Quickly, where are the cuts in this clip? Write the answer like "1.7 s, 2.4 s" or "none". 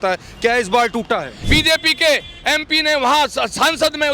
1.5 s